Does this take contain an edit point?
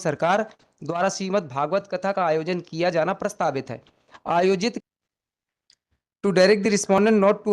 yes; 1 cut; at 4.8 s

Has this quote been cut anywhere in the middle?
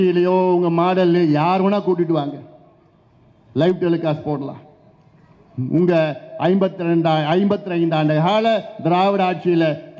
no; 0 cuts

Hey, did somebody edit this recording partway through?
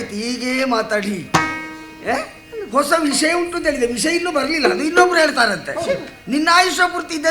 no; 0 cuts

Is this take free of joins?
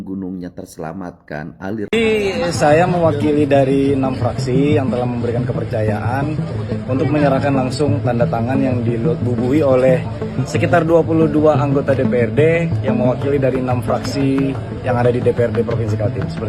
no; 1 cut; at 1.9 s

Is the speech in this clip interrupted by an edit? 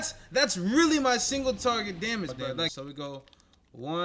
yes; 1 cut; at 2.7 s

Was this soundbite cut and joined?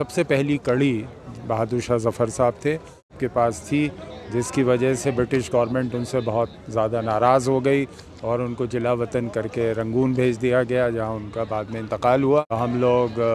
yes; 2 cuts; at 3.2 s, 12.5 s

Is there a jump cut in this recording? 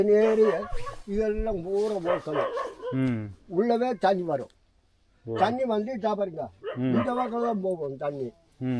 no; 0 cuts

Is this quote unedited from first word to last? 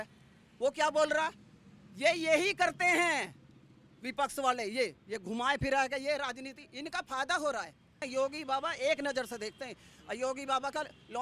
no; 1 cut; at 8.0 s

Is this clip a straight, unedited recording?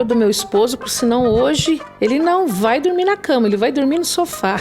yes; 0 cuts

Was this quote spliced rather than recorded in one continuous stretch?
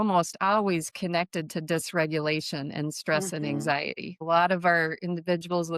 yes; 1 cut; at 4.2 s

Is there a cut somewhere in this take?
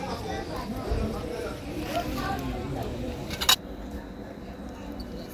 yes; 1 cut; at 3.6 s

